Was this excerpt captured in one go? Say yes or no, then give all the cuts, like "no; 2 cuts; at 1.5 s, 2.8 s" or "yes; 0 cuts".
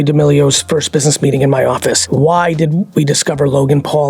no; 1 cut; at 2.0 s